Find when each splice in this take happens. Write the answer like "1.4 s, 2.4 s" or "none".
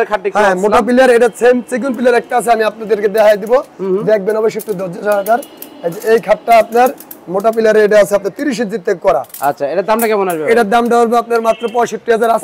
none